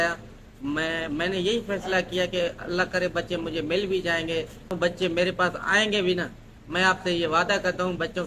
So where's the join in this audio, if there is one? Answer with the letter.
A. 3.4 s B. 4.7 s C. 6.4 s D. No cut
B